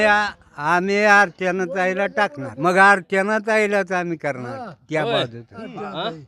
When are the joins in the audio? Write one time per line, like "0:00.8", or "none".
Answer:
0:02.4